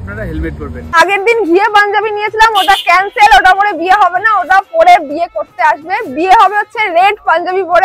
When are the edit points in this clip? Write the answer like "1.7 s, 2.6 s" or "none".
1.0 s